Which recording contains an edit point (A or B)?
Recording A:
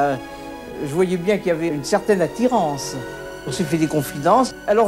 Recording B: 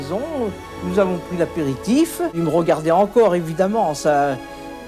B